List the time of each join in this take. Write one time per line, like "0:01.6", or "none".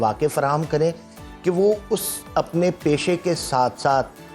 none

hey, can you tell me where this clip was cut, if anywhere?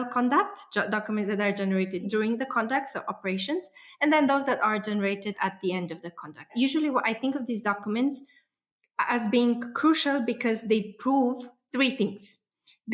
none

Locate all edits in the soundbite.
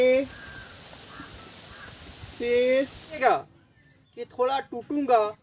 0:03.2

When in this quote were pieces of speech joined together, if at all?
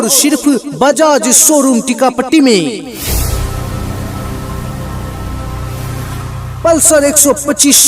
0:02.9
0:04.6
0:06.4

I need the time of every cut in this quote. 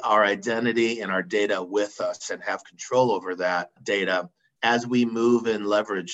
0:03.7

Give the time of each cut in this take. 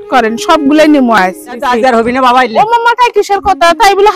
0:01.6

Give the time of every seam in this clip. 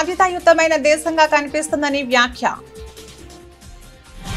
0:02.6

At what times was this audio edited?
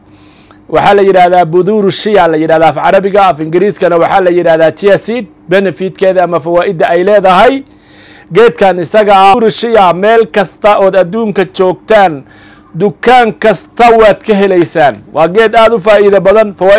0:09.4

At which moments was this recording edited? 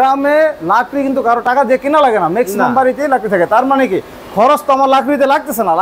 none

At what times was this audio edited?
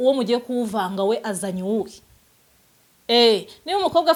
none

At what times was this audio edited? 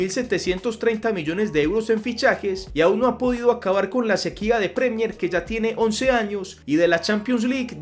none

